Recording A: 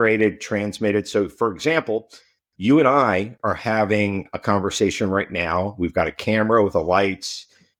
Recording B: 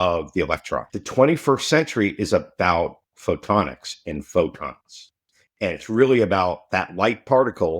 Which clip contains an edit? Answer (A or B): B